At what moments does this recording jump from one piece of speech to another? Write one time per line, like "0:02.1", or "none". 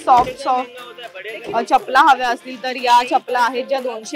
none